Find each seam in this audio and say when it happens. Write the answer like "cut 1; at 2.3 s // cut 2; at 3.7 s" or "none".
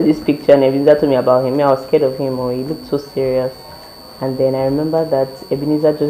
none